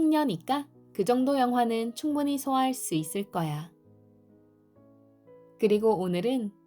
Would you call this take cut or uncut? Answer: cut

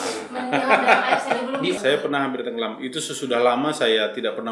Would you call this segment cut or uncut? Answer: cut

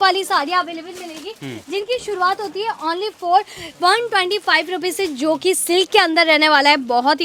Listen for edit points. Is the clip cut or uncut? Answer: uncut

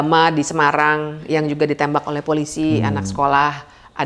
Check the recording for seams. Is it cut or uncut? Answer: uncut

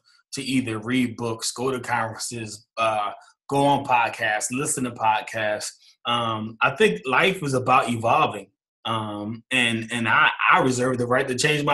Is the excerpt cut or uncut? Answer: uncut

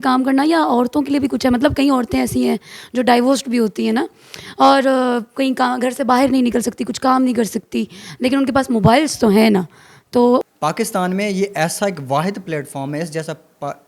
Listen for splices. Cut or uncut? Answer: cut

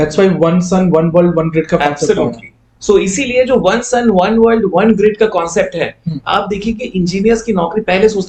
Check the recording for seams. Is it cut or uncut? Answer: uncut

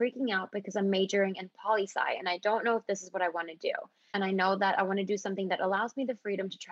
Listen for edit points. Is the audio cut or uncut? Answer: cut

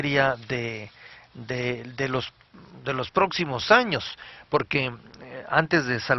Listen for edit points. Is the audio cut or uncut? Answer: uncut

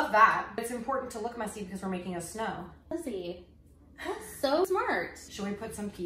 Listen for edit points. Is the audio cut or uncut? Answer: cut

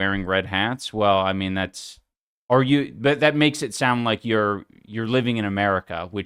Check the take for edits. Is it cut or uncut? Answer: uncut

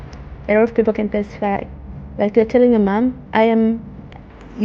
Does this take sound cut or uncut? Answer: uncut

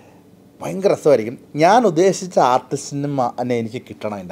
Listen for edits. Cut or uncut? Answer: uncut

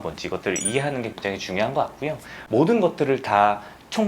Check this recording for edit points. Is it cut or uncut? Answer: cut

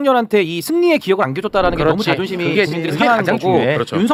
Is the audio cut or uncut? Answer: uncut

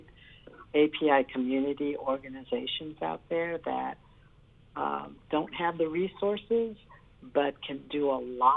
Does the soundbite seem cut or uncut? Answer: uncut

